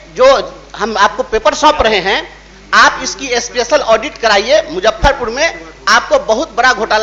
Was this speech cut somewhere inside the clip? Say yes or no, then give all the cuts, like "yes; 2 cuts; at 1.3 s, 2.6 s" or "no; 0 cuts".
no; 0 cuts